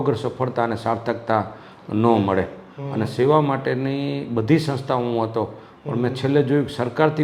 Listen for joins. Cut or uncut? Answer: uncut